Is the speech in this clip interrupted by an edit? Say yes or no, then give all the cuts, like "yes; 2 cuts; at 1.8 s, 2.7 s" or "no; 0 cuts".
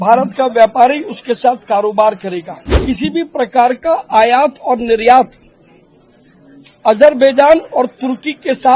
yes; 1 cut; at 2.6 s